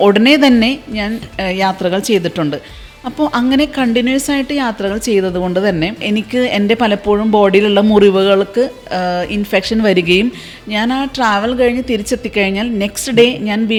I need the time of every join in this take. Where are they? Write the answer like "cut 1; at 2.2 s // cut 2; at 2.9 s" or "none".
none

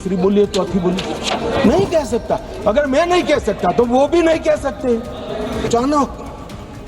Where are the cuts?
cut 1; at 5.6 s

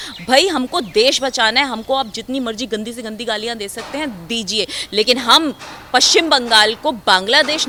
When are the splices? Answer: none

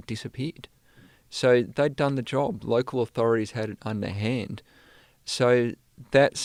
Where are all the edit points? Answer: none

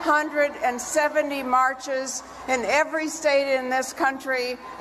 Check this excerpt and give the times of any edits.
none

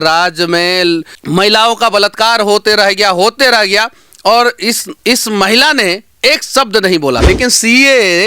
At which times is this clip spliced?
cut 1; at 1.1 s // cut 2; at 4.9 s // cut 3; at 7.2 s

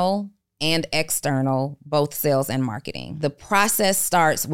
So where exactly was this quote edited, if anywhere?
cut 1; at 3.1 s

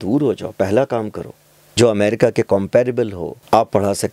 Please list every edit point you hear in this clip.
cut 1; at 1.5 s

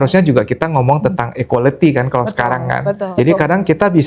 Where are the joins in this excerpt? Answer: cut 1; at 3.0 s

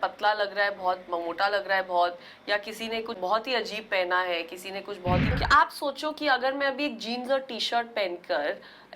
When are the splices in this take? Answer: cut 1; at 3.1 s // cut 2; at 5.3 s

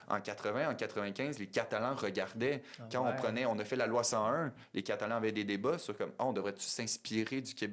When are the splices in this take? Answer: none

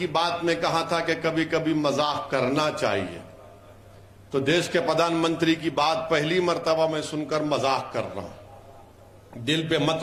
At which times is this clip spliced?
none

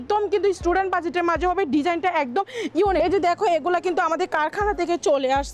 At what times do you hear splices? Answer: cut 1; at 3.0 s

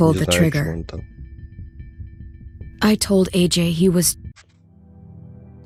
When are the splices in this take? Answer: none

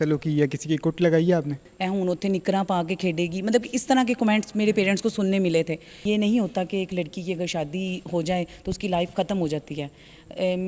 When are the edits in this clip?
cut 1; at 1.7 s // cut 2; at 5.9 s

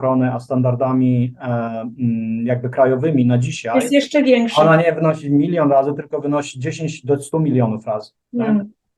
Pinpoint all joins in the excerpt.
none

